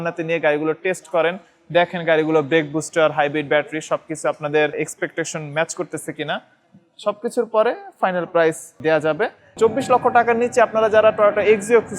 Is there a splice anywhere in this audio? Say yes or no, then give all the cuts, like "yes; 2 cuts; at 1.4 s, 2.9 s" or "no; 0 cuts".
no; 0 cuts